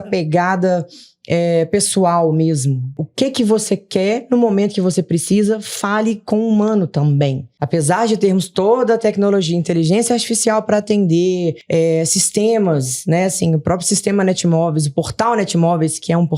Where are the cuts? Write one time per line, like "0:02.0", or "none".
0:03.0
0:07.5
0:11.6